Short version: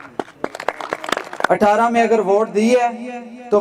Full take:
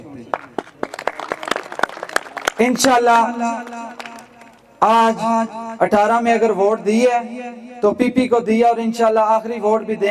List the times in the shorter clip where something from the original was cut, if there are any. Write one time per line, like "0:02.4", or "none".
0:01.4